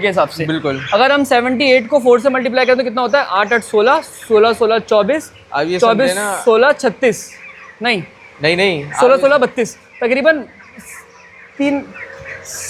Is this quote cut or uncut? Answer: uncut